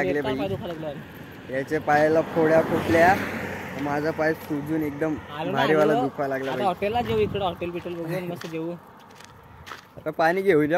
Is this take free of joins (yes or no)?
yes